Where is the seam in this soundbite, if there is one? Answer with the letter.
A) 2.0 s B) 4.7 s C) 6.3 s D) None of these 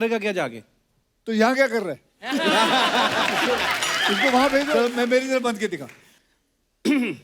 B